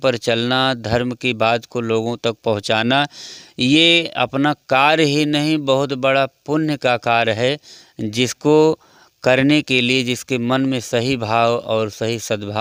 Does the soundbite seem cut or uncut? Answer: uncut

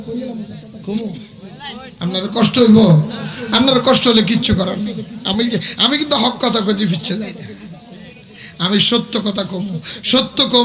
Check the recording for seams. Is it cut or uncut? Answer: uncut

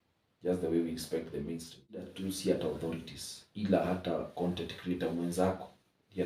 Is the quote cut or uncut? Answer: cut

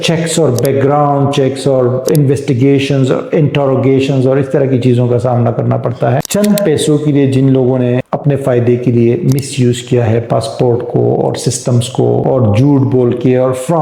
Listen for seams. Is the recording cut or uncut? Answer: uncut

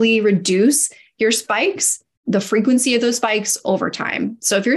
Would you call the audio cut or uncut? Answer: uncut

